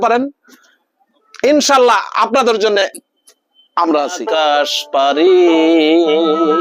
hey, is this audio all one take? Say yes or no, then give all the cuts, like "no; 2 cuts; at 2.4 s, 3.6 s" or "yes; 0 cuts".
no; 1 cut; at 4.2 s